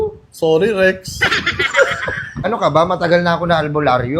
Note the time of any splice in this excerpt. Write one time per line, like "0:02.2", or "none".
0:02.4

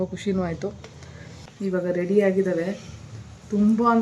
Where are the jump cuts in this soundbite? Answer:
0:01.4

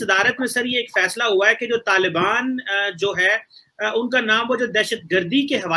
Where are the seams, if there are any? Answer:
none

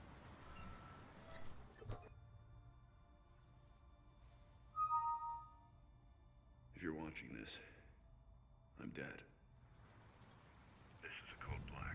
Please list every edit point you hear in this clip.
0:04.8
0:05.5

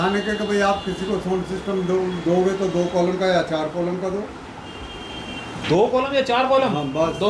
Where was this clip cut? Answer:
none

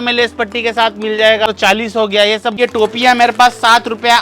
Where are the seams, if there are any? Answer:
0:01.5
0:02.5

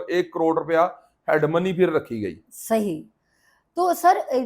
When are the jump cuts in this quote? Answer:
none

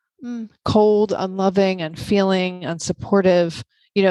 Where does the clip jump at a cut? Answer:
none

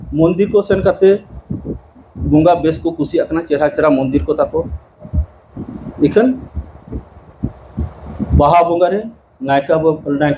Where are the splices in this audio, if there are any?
none

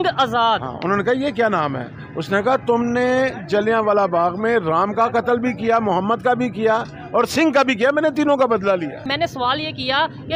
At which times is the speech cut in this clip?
0:09.1

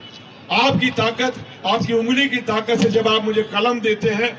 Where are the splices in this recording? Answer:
none

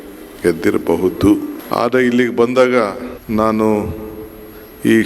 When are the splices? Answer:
0:01.5
0:03.1

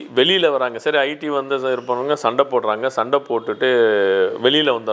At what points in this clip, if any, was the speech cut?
none

